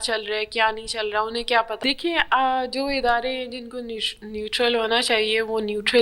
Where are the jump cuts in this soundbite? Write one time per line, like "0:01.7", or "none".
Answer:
0:01.8